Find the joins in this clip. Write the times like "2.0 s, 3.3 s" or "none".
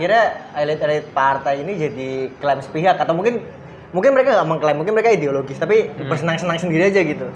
none